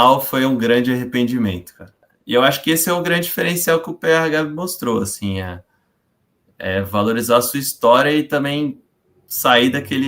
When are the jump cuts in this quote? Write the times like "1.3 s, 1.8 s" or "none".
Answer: 2.1 s